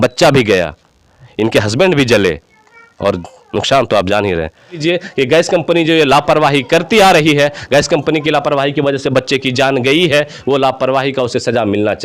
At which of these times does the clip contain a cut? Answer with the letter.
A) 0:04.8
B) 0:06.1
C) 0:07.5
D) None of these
A